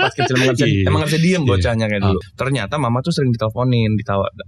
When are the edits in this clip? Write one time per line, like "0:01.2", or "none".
0:02.3